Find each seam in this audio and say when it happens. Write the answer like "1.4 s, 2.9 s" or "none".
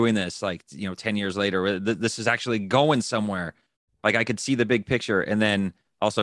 none